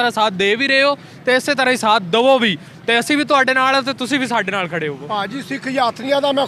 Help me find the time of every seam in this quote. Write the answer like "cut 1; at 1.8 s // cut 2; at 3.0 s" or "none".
none